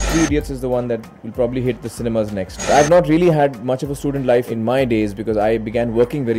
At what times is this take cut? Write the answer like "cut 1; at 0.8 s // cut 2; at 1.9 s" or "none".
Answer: cut 1; at 2.6 s